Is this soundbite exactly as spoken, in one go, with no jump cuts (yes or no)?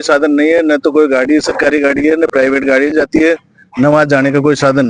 yes